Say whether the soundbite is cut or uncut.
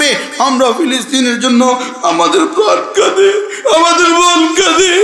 uncut